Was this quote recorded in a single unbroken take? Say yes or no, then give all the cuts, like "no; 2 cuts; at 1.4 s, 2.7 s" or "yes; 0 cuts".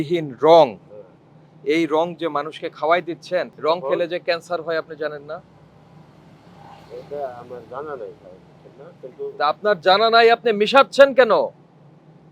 yes; 0 cuts